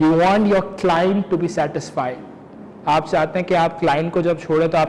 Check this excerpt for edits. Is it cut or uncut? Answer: uncut